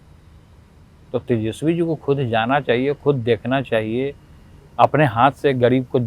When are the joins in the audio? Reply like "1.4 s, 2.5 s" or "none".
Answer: none